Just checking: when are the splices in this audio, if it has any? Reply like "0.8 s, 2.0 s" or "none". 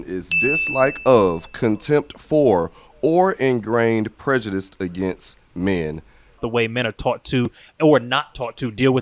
6.4 s